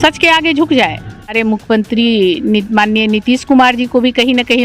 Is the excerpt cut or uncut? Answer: cut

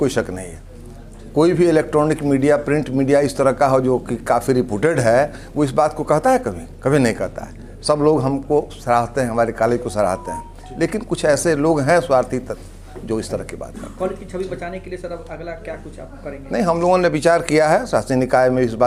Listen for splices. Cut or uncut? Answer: uncut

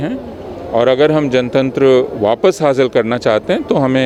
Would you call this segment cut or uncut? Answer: uncut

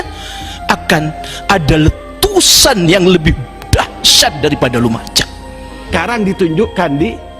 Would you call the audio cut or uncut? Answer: cut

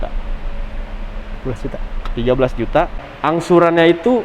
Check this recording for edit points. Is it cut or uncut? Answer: cut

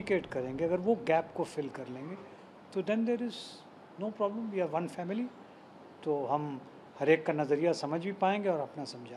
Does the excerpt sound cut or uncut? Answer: uncut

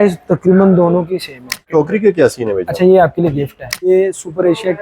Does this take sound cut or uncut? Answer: cut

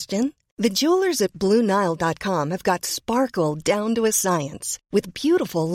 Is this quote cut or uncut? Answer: uncut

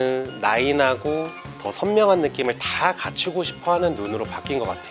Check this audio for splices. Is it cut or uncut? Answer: uncut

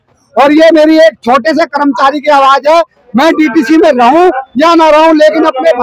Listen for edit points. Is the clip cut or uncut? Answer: uncut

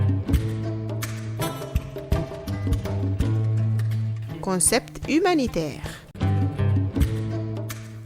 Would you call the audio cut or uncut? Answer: cut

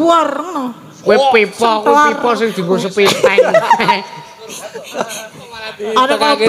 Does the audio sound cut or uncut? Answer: uncut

